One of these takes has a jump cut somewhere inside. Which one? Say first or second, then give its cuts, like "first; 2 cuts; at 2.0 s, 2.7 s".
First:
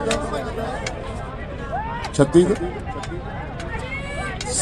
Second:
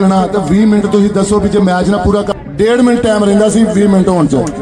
second; 1 cut; at 2.3 s